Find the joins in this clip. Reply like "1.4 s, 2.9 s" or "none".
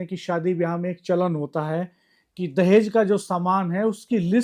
none